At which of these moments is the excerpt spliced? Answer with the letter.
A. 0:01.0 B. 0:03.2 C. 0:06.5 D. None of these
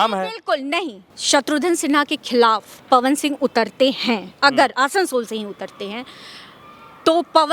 A